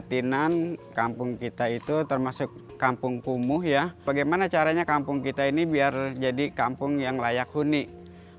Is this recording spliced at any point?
yes; 2 cuts; at 0.9 s, 4.1 s

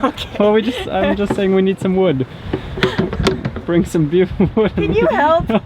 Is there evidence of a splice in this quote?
no; 0 cuts

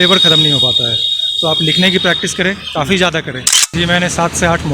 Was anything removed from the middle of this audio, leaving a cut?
yes; 1 cut; at 3.6 s

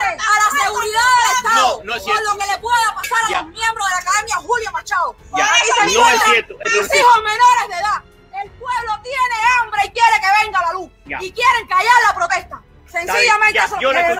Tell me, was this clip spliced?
no; 0 cuts

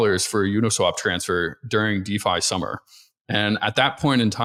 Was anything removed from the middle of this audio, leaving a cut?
no; 0 cuts

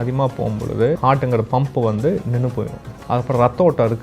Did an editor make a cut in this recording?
yes; 1 cut; at 1.0 s

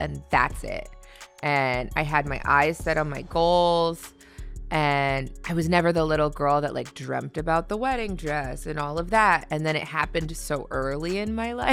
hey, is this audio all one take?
yes; 0 cuts

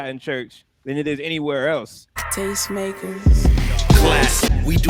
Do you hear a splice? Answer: yes; 1 cut; at 2.3 s

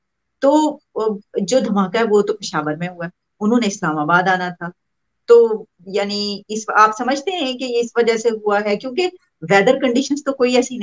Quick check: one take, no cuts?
yes; 0 cuts

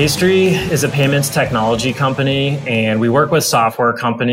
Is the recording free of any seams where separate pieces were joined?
yes; 0 cuts

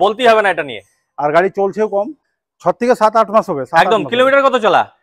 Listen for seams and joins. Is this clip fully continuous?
no; 1 cut; at 2.2 s

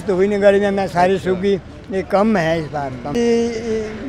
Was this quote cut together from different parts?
yes; 1 cut; at 3.1 s

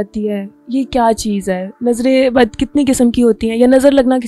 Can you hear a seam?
no; 0 cuts

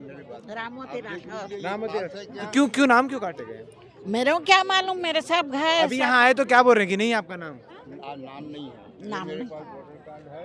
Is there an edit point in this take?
no; 0 cuts

